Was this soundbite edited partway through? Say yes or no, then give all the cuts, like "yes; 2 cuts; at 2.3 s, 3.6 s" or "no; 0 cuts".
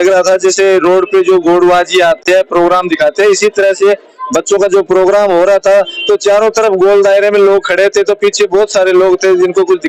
no; 0 cuts